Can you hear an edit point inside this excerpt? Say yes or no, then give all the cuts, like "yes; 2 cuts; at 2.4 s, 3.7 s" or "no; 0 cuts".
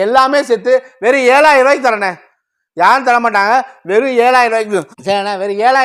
no; 0 cuts